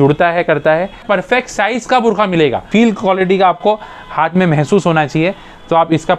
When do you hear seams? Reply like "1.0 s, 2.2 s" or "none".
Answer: 1.0 s, 2.7 s